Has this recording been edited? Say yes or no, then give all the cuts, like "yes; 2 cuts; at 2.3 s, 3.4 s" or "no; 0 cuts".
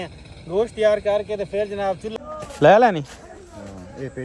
yes; 1 cut; at 2.1 s